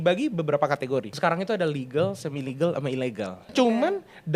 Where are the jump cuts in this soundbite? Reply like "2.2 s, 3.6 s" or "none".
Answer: 1.1 s, 3.4 s